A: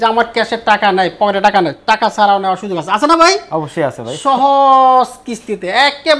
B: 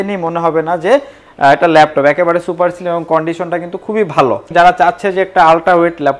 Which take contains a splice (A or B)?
B